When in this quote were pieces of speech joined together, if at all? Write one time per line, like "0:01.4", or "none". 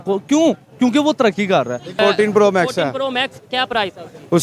0:02.0

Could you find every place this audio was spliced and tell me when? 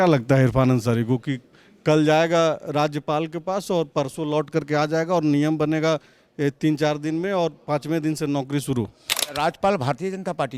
0:09.2

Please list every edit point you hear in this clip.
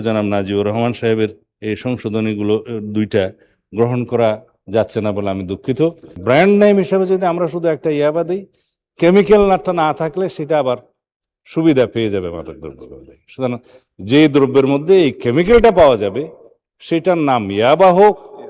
0:06.2

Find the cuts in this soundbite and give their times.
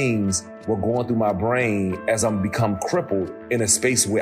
none

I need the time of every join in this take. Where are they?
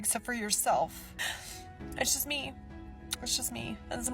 0:01.2

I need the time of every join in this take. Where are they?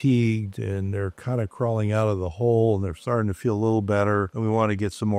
none

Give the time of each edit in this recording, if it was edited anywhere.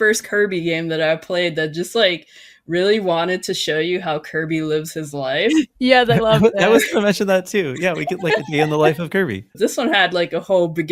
0:09.5

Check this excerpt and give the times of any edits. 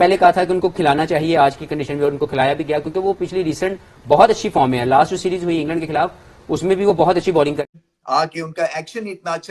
0:07.6

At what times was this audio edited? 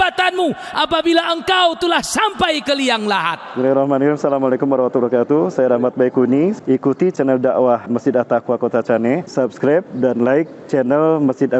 0:03.5

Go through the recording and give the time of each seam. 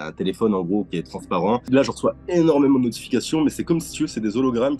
0:01.7

